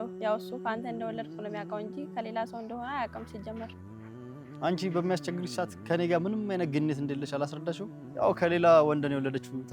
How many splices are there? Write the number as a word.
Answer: one